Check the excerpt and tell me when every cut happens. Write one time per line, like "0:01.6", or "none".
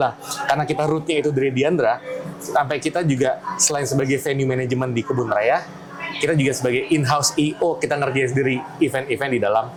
none